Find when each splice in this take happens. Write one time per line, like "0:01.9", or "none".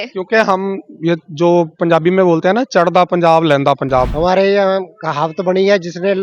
0:04.1